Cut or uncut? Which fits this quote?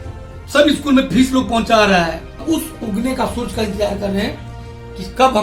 cut